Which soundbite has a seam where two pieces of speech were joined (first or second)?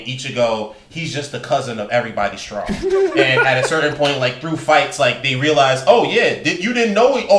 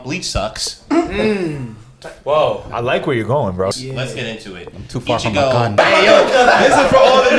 second